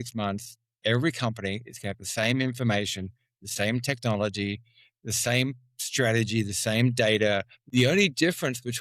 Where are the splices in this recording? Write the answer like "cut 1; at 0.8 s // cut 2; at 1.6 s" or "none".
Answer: cut 1; at 7.6 s